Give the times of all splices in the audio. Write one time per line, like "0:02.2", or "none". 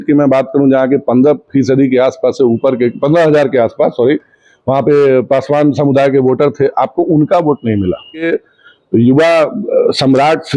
0:08.3